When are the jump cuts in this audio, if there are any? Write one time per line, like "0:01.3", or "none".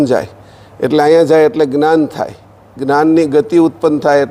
none